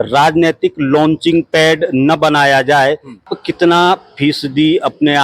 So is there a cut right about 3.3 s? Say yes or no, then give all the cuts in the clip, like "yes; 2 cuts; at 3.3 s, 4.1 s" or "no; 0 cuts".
yes; 1 cut; at 3.3 s